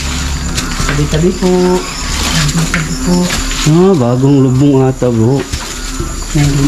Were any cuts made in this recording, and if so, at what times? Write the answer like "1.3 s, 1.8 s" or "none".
none